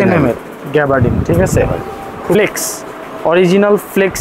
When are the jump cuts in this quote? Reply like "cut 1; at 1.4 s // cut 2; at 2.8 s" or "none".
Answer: cut 1; at 2.3 s